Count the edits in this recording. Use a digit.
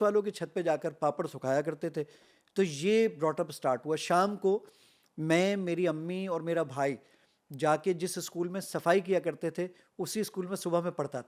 0